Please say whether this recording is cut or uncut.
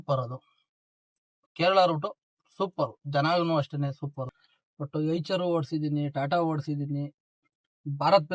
cut